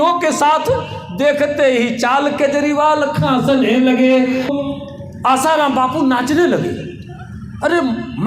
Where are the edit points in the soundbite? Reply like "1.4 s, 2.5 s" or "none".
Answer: 4.5 s